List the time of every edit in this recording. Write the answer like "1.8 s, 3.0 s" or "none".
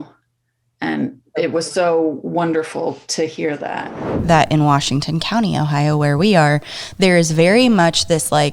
4.1 s